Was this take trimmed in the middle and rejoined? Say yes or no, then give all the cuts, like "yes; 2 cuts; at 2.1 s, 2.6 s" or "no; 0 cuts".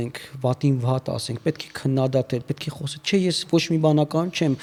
no; 0 cuts